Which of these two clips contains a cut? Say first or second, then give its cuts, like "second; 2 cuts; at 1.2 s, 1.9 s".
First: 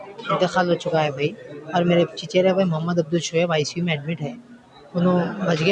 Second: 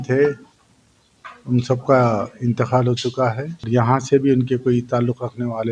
second; 1 cut; at 3.6 s